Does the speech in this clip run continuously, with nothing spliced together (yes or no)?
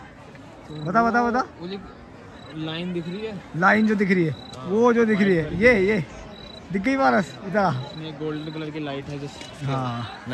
yes